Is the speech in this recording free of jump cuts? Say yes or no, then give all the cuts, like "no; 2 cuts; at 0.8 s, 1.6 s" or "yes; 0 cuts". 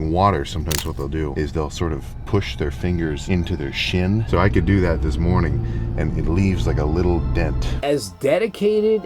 no; 4 cuts; at 1.3 s, 3.2 s, 4.3 s, 7.7 s